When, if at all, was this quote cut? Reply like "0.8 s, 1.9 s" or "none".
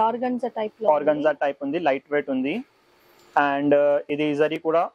none